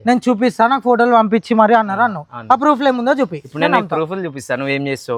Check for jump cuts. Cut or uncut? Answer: uncut